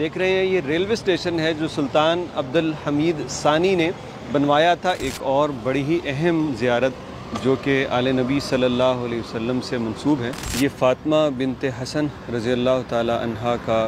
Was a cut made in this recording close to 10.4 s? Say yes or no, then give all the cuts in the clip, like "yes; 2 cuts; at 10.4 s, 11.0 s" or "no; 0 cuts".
yes; 2 cuts; at 5.1 s, 10.4 s